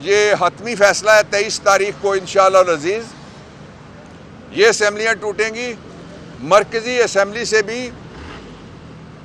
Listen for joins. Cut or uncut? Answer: uncut